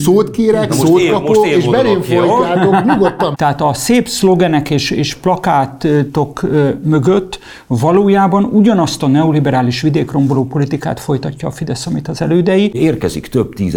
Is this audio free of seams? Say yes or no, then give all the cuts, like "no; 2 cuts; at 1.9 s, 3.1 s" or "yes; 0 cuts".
no; 2 cuts; at 3.3 s, 12.8 s